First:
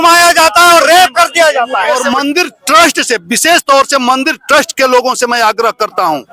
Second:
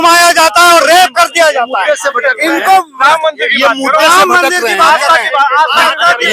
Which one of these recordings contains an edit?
first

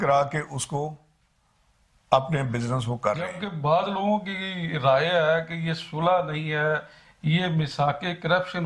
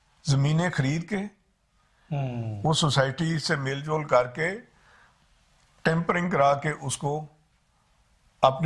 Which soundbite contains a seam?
first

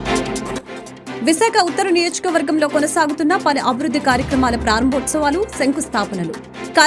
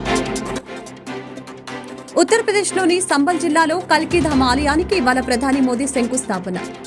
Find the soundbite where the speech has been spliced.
first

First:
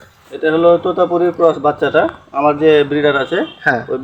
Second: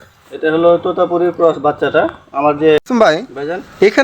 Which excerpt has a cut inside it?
second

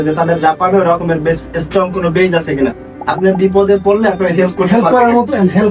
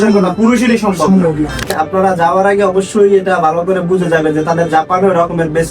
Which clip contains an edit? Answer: second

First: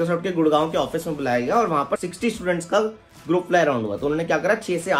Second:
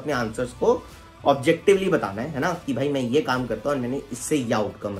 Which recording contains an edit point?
first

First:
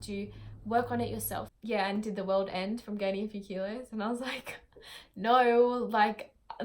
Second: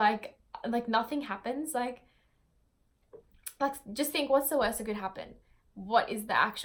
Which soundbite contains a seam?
first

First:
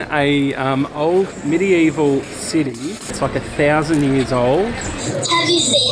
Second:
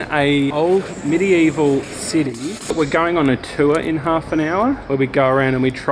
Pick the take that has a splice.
second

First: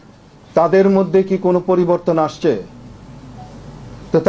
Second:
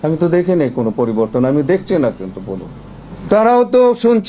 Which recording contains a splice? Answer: second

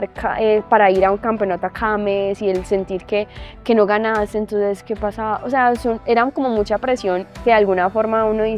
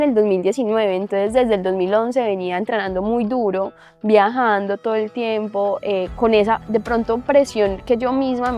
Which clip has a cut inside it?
first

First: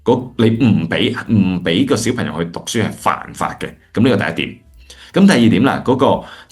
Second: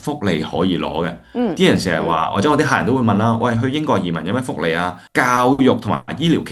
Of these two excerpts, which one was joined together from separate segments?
second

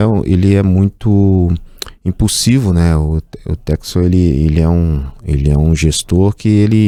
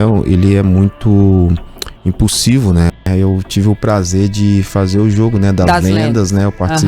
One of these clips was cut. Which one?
second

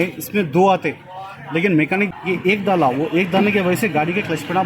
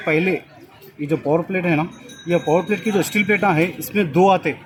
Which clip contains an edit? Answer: first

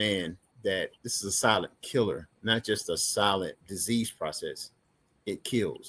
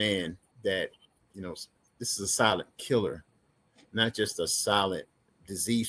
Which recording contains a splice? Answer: first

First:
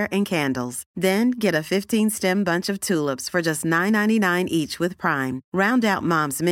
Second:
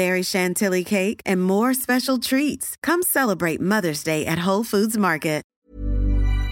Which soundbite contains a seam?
second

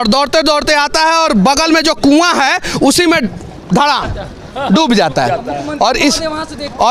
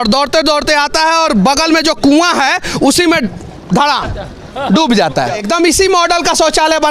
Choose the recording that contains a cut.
second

